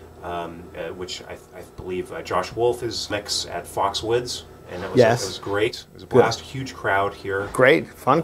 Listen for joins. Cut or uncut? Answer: uncut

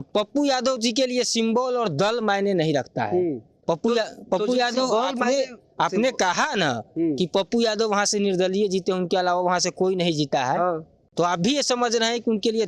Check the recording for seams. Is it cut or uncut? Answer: uncut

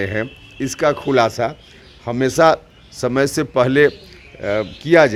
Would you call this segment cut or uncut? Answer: uncut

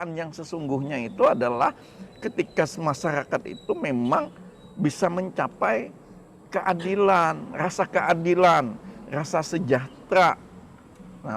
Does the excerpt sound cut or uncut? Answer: uncut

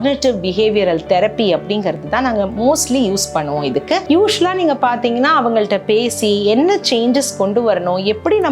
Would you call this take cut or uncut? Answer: uncut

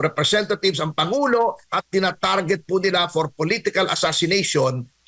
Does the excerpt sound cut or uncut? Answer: uncut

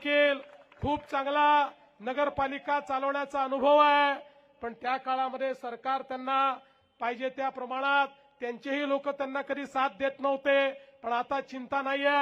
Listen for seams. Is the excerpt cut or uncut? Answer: uncut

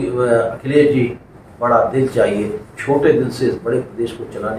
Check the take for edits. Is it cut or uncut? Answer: uncut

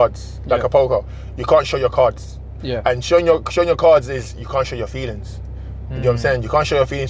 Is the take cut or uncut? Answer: uncut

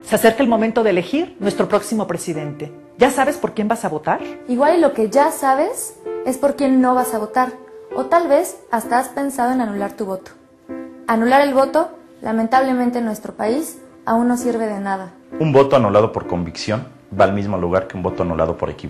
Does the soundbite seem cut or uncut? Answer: cut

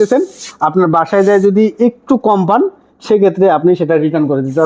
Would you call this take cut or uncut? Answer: uncut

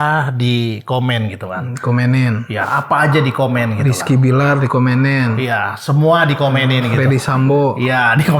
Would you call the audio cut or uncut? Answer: uncut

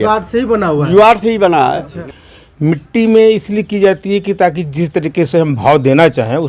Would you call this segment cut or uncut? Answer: cut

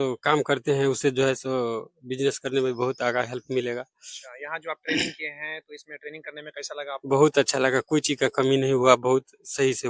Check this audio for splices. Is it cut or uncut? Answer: uncut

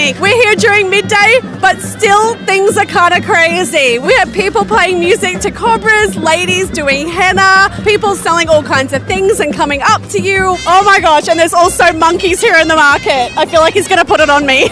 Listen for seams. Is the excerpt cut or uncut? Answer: uncut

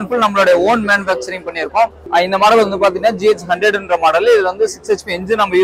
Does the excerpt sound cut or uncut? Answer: cut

